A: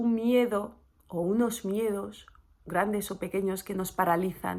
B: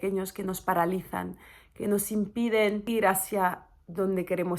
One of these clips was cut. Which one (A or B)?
B